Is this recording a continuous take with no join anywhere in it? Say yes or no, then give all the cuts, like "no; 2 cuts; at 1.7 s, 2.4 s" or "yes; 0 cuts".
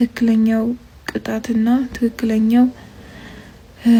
yes; 0 cuts